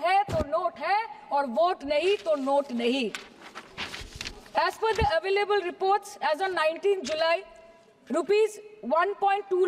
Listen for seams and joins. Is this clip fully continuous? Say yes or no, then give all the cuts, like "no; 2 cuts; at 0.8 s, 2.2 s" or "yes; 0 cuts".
yes; 0 cuts